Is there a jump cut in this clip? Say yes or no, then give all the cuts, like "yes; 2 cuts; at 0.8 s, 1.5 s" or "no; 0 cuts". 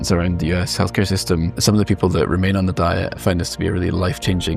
yes; 2 cuts; at 1.5 s, 3.2 s